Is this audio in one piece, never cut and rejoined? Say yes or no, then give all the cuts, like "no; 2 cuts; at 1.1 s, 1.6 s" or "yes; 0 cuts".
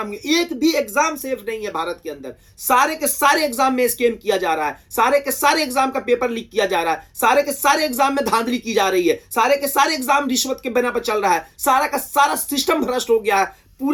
yes; 0 cuts